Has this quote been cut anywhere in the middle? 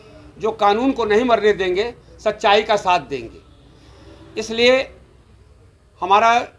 no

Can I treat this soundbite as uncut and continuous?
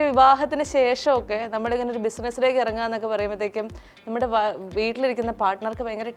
yes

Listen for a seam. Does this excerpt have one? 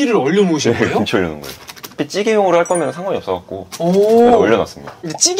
yes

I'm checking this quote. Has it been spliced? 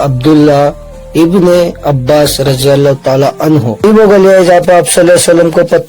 yes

